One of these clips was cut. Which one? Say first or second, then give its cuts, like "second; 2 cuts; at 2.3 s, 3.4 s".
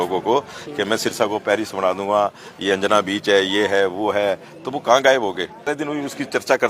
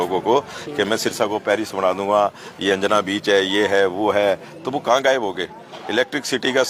first; 1 cut; at 5.7 s